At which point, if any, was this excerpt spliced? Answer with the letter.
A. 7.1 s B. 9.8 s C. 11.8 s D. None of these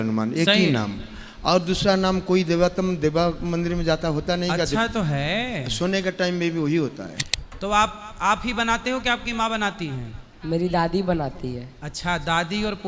A